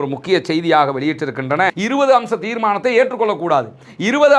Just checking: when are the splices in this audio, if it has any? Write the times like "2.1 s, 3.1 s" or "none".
1.8 s